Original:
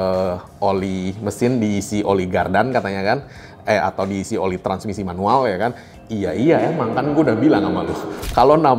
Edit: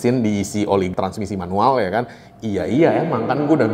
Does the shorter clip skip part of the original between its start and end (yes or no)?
yes